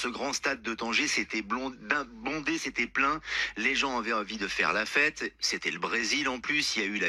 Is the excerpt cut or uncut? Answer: uncut